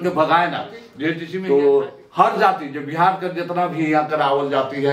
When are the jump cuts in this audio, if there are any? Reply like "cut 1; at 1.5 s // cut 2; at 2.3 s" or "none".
cut 1; at 1.3 s